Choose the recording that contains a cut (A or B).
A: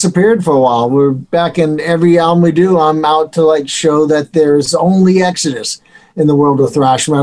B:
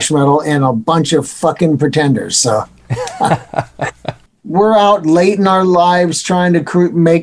B